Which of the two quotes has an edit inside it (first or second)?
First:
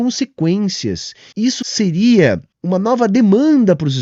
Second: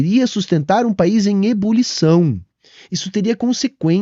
first